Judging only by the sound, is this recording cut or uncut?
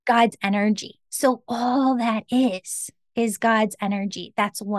uncut